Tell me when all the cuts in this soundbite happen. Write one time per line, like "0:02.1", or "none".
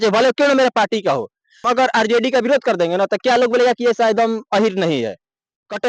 0:01.6